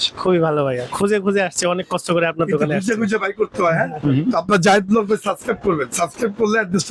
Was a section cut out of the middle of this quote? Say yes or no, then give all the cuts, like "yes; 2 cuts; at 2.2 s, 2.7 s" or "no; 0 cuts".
no; 0 cuts